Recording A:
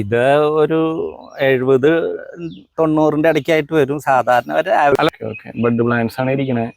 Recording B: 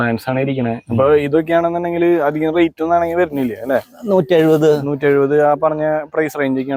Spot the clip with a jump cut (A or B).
A